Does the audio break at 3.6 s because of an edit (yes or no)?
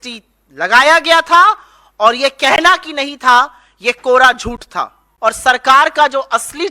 no